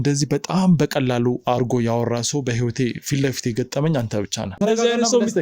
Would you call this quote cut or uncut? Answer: cut